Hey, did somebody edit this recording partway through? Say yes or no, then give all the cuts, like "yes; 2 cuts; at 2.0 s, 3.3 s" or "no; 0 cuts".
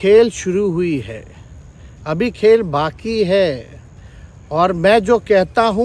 no; 0 cuts